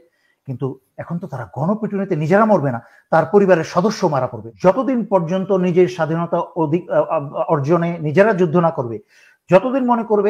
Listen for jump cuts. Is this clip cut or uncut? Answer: cut